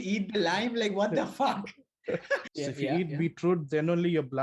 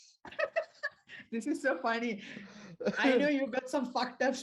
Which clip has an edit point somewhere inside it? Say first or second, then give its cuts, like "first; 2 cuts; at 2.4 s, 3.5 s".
first; 1 cut; at 2.5 s